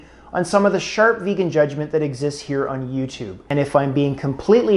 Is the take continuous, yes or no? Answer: no